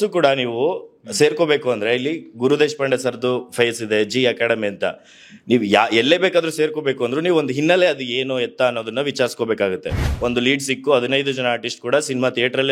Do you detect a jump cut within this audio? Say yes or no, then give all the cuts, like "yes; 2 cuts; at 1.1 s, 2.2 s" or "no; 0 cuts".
yes; 1 cut; at 10.0 s